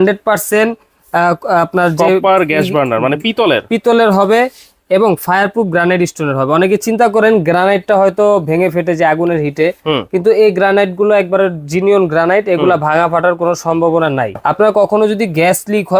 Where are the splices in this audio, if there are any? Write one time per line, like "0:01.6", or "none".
0:14.3